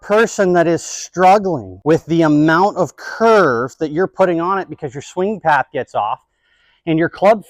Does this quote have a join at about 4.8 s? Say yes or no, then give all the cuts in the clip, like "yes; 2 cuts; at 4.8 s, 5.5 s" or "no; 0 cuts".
no; 1 cut; at 1.7 s